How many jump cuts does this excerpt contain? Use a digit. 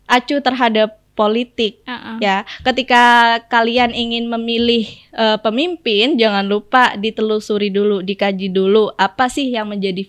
0